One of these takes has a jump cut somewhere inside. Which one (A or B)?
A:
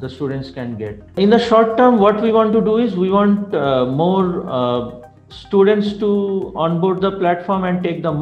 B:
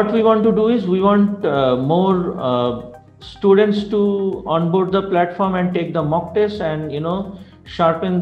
A